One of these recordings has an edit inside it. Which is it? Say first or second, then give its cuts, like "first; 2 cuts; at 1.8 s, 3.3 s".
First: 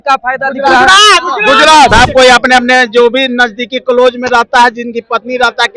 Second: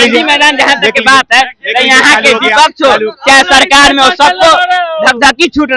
first; 1 cut; at 1.9 s